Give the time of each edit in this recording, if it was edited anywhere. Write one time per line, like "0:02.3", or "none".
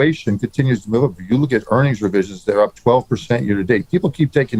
none